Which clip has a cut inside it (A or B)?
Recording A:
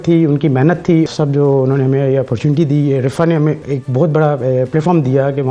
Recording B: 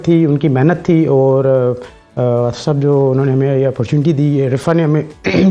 A